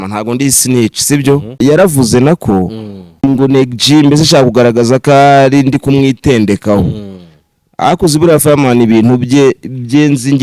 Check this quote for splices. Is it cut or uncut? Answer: cut